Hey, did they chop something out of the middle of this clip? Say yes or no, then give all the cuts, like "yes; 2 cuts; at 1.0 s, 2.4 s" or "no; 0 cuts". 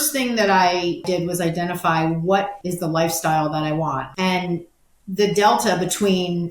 yes; 3 cuts; at 1.0 s, 2.6 s, 4.0 s